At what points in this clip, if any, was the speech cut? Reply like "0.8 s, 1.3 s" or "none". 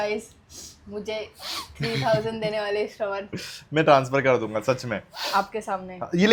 none

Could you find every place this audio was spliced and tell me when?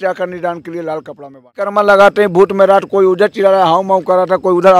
1.7 s

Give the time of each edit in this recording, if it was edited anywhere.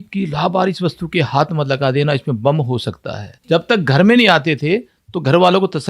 3.3 s

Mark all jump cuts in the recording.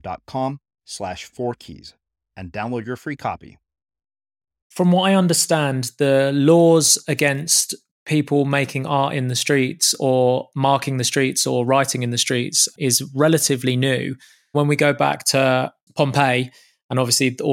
4.6 s, 12.7 s, 14.5 s, 15.8 s

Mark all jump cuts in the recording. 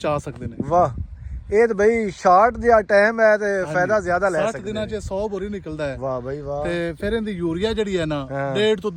none

